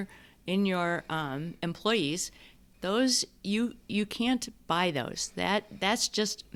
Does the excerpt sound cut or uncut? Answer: uncut